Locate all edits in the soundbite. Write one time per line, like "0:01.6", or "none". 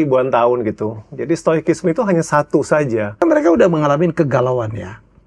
0:03.2